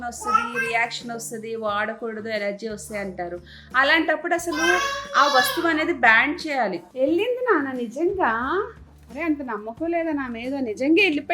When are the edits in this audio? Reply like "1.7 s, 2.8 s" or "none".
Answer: 6.8 s